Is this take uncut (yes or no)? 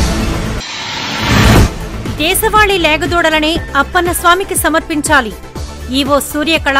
yes